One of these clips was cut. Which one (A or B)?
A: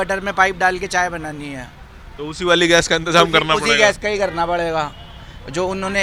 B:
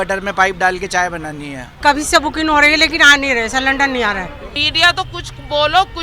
B